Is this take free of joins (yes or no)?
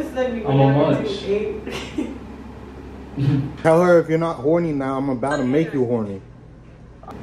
no